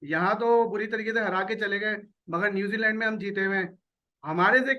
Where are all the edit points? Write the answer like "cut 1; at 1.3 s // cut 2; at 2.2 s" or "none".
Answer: none